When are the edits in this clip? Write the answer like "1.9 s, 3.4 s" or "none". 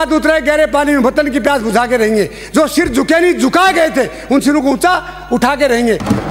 none